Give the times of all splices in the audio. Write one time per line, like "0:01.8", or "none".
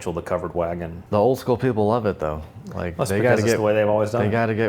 0:01.0

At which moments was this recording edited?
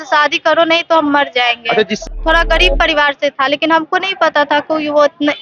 0:02.0

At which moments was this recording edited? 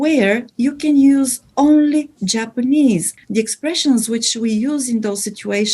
0:03.1

